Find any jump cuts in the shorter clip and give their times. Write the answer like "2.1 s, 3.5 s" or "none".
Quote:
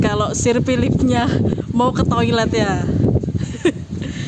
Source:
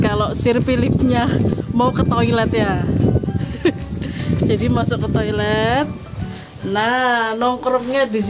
none